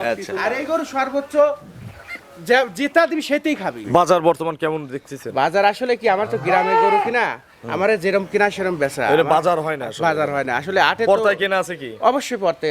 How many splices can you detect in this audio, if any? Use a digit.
1